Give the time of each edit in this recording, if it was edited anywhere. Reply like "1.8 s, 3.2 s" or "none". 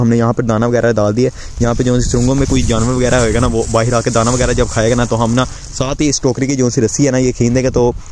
none